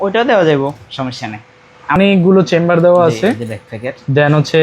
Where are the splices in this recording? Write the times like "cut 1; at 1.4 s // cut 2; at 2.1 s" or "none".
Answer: cut 1; at 2.0 s